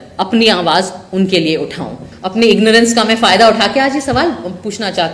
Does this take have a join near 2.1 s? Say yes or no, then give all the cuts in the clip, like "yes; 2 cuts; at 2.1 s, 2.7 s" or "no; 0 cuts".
yes; 1 cut; at 2.1 s